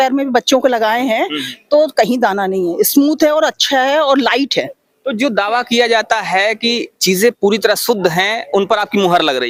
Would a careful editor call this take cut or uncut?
uncut